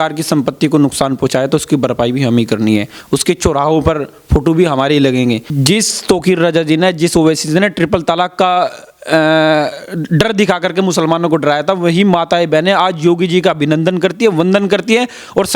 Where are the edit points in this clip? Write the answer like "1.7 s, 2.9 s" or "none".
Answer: 5.5 s